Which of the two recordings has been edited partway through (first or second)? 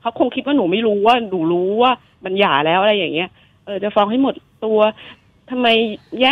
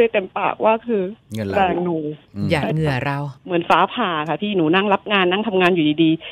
second